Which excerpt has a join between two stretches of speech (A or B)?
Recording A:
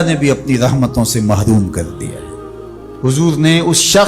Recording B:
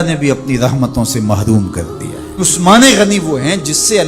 B